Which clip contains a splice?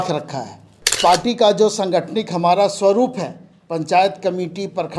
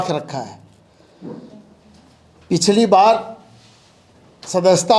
first; 1 cut; at 1.0 s

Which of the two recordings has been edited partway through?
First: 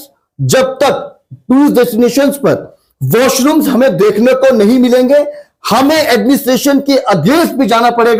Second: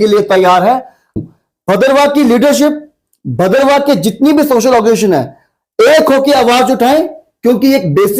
second; 1 cut; at 1.2 s

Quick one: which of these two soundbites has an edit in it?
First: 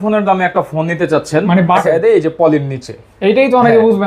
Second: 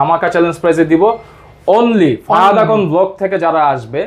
first; 1 cut; at 1.8 s

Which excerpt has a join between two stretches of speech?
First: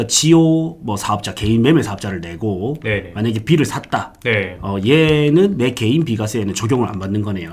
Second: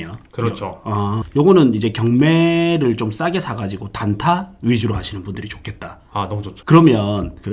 second; 1 cut; at 1.2 s

